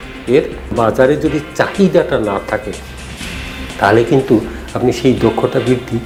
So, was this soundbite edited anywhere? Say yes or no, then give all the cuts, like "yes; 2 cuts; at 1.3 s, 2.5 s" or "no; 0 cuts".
no; 0 cuts